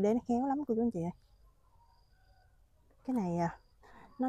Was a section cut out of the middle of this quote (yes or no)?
no